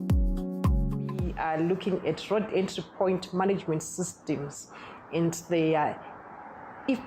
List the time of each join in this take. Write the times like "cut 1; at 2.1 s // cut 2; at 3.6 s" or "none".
cut 1; at 1.3 s